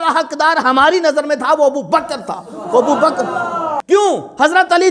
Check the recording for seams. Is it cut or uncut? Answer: cut